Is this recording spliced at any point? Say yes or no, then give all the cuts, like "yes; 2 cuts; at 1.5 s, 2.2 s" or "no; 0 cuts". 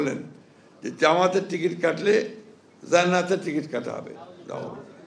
no; 0 cuts